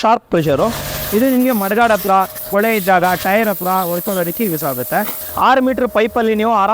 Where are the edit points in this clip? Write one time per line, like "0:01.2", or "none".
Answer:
0:00.9
0:02.4
0:05.2